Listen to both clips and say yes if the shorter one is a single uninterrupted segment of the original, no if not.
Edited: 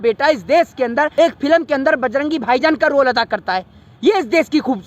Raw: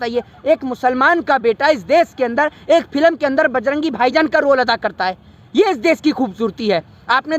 no